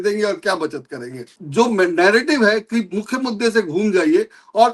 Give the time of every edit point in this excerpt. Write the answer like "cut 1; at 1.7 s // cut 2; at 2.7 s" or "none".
cut 1; at 1.3 s